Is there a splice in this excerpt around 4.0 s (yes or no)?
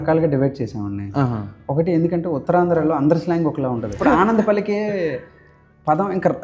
yes